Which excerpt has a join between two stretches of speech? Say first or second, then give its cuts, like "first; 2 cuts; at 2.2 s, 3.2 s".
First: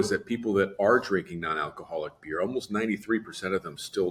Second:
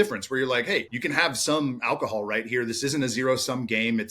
second; 1 cut; at 0.9 s